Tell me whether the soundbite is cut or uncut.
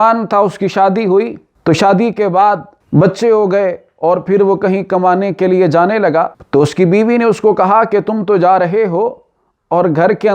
cut